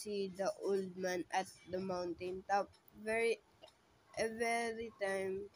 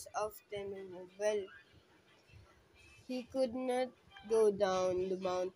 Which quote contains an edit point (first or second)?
second